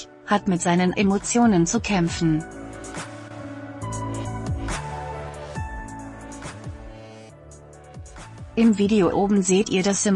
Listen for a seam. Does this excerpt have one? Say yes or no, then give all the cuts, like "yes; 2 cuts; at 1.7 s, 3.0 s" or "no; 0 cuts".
yes; 2 cuts; at 2.5 s, 8.3 s